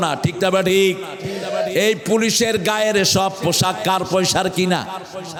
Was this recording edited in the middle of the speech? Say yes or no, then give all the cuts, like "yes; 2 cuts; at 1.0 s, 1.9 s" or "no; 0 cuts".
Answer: no; 0 cuts